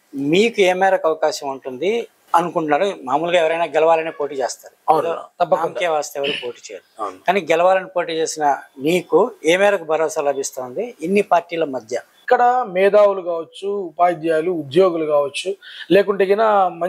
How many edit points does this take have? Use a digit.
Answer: 2